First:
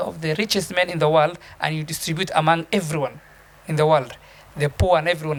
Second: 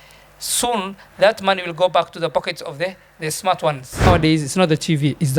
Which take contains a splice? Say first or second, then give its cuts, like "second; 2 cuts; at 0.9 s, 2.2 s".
second; 1 cut; at 4.1 s